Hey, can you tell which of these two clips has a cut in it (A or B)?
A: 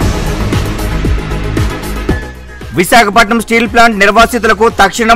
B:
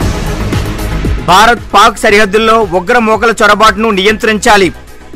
A